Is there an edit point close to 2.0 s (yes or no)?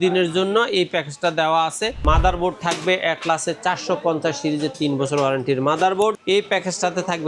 yes